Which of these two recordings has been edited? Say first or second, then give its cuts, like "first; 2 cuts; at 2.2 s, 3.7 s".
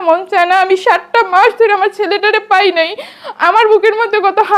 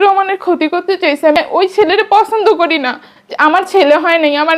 second; 1 cut; at 1.4 s